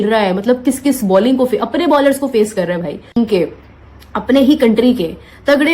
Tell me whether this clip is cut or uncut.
cut